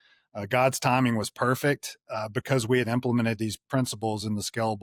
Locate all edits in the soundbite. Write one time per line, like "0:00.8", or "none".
none